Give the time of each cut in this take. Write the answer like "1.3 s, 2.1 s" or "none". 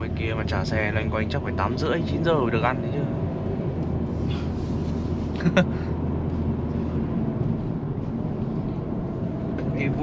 none